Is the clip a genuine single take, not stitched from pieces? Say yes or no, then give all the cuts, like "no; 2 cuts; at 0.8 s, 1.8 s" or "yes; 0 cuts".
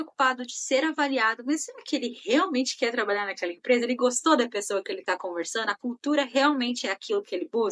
yes; 0 cuts